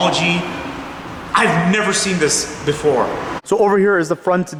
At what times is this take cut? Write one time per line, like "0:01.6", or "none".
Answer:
none